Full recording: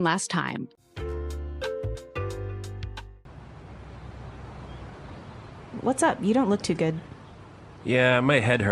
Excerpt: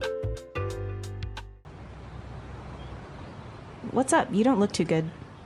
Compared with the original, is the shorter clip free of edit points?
no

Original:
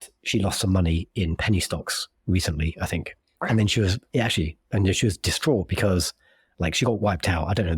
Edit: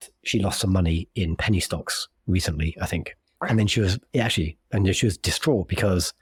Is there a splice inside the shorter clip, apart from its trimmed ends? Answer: no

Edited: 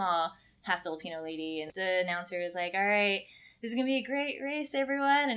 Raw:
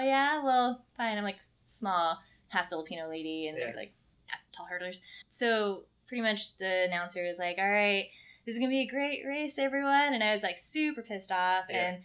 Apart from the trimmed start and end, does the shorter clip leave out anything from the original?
yes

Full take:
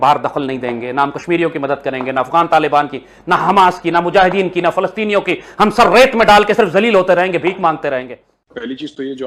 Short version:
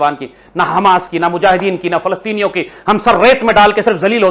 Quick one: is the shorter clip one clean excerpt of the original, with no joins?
yes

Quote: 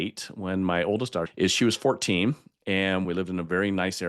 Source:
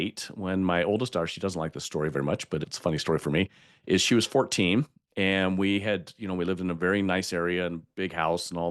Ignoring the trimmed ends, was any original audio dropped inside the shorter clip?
yes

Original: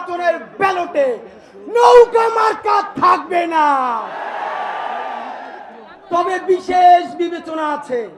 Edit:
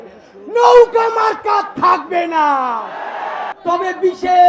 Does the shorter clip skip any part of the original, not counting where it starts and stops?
yes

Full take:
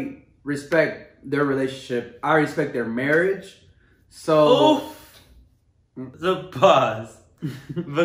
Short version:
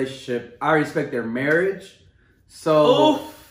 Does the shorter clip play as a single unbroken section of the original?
yes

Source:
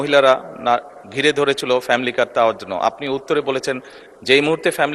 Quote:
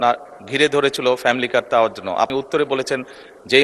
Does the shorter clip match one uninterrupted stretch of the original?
no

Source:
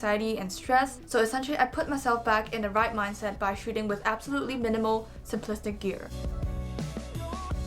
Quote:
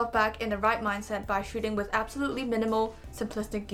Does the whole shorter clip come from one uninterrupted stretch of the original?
yes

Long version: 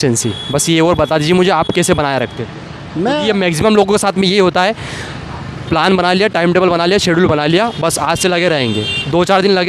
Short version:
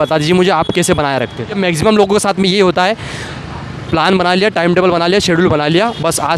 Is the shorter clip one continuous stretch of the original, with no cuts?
no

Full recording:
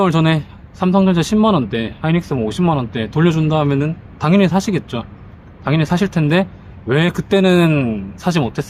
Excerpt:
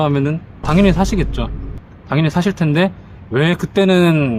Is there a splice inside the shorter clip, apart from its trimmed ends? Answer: no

